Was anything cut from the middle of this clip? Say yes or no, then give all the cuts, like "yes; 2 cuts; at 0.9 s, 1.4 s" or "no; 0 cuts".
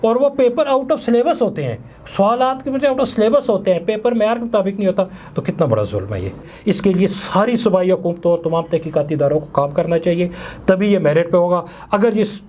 yes; 1 cut; at 6.5 s